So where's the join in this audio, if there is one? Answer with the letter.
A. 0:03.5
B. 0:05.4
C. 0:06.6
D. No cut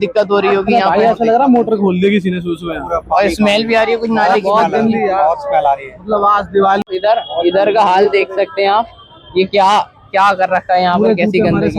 D